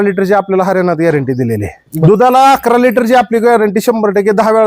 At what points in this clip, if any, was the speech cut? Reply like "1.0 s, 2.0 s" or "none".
1.8 s